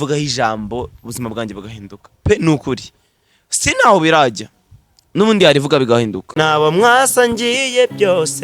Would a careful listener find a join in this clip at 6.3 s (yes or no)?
yes